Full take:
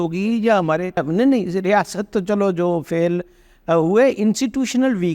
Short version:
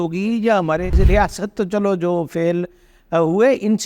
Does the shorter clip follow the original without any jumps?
no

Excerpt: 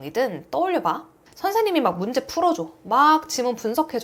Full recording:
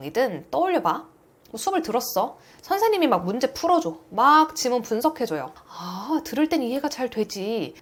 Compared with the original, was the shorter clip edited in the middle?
yes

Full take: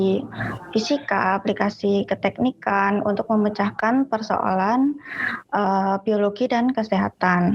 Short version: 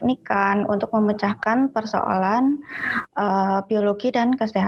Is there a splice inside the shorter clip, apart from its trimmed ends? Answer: no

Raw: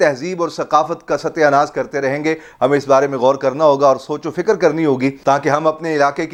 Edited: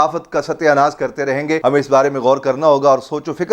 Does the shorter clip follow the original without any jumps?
no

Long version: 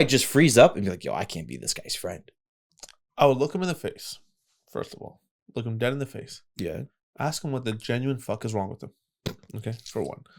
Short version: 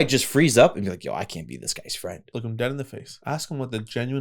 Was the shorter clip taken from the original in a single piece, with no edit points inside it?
no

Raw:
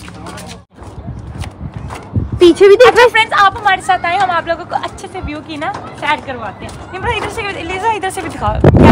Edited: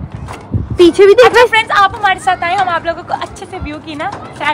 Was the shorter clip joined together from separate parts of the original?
no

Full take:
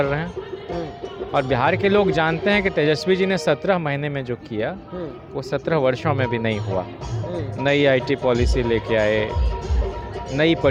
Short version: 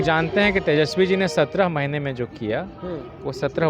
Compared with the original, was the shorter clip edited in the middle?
no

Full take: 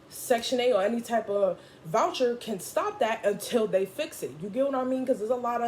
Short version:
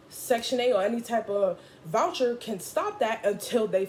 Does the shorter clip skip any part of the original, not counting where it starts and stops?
no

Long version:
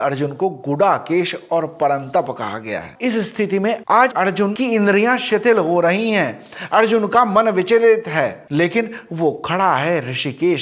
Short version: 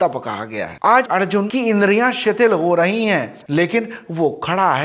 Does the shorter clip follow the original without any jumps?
no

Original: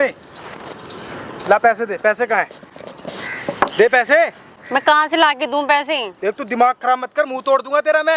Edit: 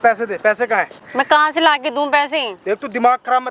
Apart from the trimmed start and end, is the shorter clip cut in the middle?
yes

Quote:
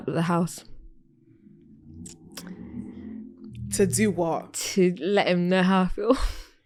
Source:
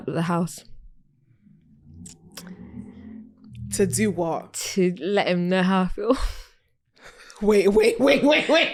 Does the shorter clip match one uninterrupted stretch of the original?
yes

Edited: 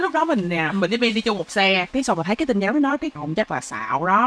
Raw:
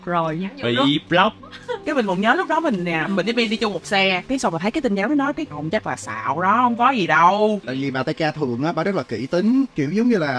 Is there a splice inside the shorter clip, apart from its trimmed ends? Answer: no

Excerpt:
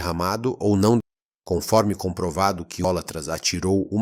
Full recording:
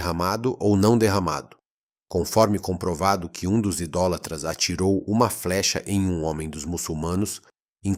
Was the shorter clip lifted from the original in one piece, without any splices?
no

